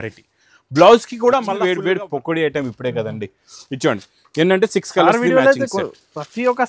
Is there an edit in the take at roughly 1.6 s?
yes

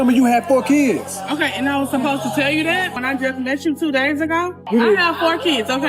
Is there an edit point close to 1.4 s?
no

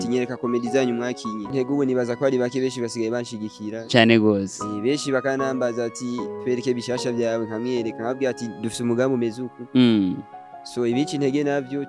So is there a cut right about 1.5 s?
yes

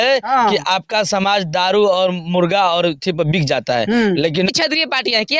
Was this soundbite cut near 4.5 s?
yes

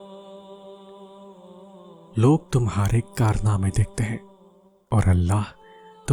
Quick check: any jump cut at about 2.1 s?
yes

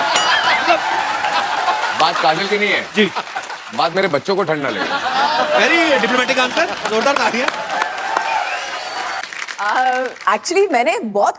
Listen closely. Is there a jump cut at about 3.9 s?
no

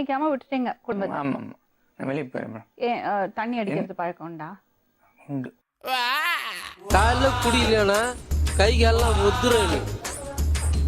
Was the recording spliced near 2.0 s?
yes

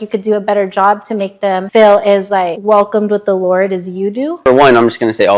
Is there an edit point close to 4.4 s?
yes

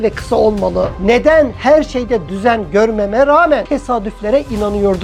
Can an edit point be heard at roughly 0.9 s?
yes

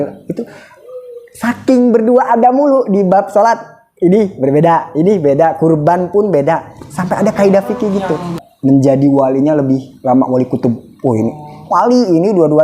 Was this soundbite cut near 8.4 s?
yes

